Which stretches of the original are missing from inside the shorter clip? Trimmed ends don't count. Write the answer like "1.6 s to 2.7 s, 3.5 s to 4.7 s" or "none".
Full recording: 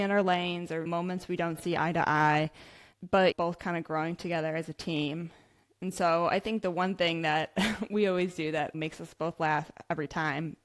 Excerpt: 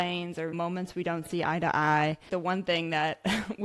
2.6 s to 6.6 s